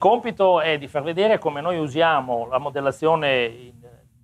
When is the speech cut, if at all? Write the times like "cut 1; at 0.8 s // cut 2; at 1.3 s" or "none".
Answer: cut 1; at 3.2 s

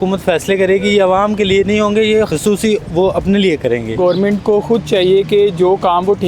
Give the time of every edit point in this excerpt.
cut 1; at 2.3 s // cut 2; at 4.0 s

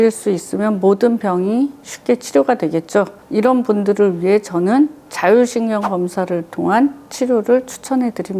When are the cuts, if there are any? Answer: none

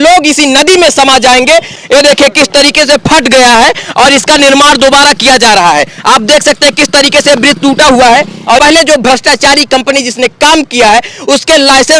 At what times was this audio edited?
cut 1; at 1.7 s // cut 2; at 8.6 s

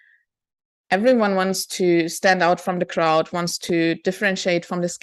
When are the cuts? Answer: none

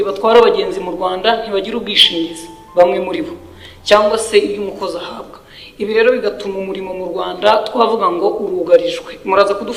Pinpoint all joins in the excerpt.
none

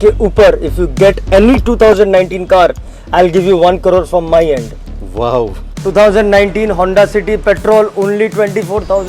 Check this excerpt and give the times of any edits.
cut 1; at 5.7 s

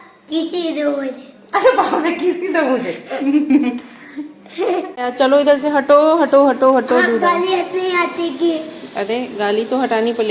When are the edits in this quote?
cut 1; at 5.0 s

